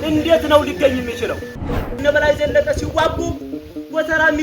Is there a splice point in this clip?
yes; 1 cut; at 2.0 s

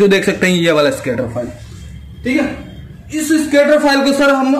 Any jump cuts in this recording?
no; 0 cuts

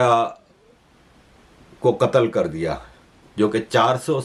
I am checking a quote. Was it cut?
no; 0 cuts

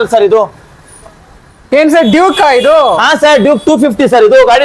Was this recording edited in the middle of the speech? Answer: no; 0 cuts

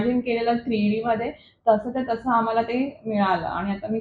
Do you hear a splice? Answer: no; 0 cuts

